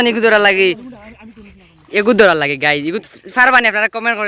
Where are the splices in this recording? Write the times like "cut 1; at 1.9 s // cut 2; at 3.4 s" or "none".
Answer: none